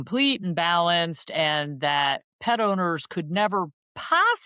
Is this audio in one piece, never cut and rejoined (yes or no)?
yes